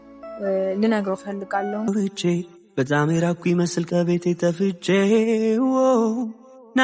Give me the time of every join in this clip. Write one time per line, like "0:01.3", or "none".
0:01.9